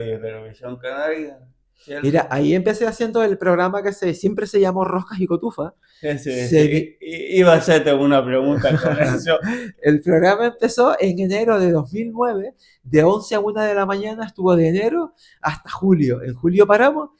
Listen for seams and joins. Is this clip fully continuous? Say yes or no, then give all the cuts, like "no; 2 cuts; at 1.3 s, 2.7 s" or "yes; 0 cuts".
yes; 0 cuts